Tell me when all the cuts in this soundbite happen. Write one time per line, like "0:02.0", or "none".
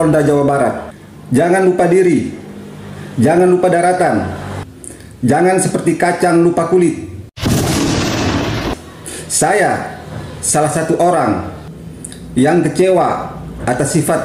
0:08.8